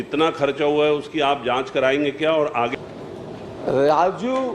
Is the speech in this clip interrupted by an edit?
yes; 1 cut; at 2.7 s

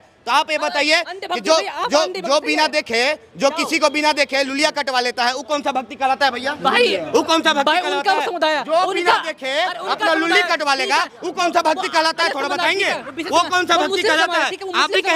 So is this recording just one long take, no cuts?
yes; 0 cuts

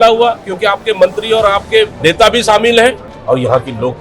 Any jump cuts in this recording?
yes; 2 cuts; at 1.9 s, 3.1 s

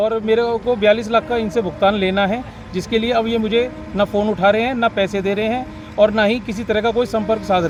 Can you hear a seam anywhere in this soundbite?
no; 0 cuts

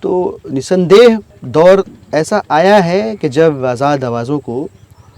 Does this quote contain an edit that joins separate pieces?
yes; 1 cut; at 1.3 s

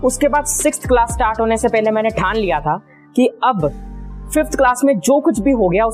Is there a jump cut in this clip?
no; 0 cuts

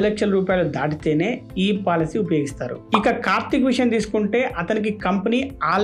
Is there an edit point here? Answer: no; 0 cuts

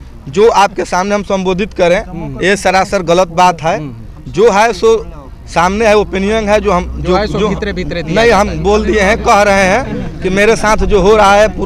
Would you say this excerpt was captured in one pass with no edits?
yes; 0 cuts

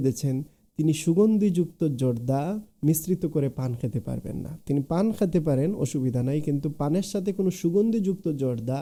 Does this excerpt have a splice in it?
no; 0 cuts

